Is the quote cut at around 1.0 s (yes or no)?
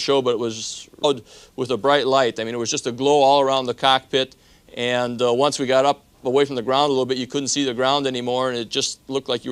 no